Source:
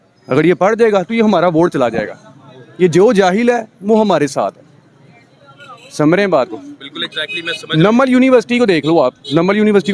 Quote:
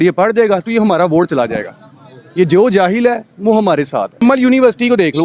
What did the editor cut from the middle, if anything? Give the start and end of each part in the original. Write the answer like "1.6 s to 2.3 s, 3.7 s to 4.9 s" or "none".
4.6 s to 7.9 s